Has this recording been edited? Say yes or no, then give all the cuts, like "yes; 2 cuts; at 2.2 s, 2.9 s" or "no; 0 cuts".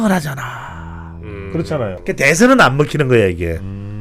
yes; 1 cut; at 2.0 s